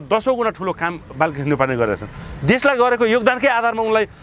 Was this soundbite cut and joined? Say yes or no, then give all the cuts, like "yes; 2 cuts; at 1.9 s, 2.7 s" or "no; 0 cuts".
no; 0 cuts